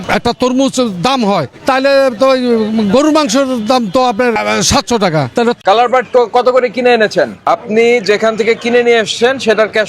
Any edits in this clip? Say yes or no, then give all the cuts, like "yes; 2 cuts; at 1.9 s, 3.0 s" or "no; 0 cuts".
yes; 1 cut; at 5.6 s